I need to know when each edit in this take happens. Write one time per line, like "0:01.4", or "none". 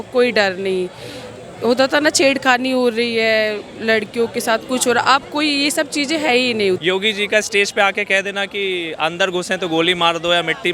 0:06.8